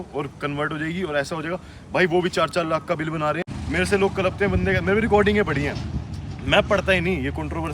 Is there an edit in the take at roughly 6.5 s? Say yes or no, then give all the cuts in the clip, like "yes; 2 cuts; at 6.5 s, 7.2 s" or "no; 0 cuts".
no; 1 cut; at 3.5 s